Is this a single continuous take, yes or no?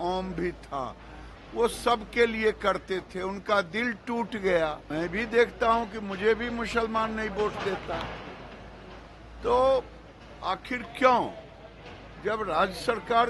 no